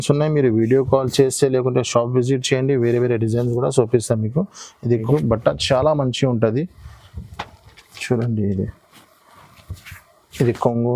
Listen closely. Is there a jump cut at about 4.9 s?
yes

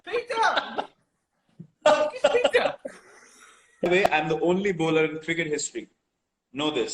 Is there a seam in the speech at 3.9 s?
yes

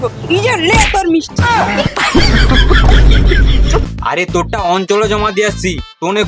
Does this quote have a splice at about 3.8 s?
yes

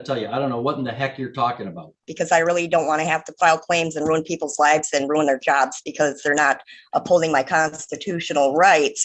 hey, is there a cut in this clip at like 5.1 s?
no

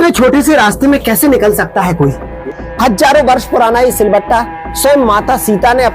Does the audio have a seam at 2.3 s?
yes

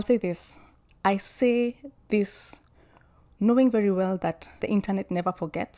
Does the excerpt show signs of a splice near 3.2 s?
no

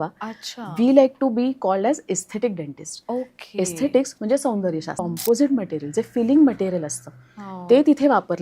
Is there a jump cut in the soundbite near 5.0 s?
yes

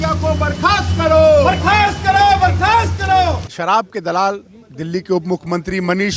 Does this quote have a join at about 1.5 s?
no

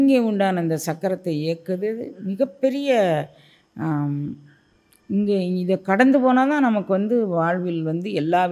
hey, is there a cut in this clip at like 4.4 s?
no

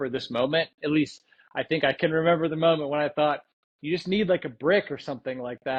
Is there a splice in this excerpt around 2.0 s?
no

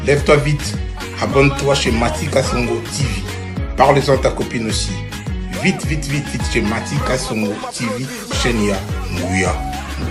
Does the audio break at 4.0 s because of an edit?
no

